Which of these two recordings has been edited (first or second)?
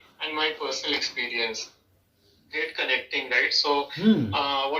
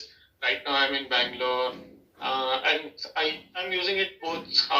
first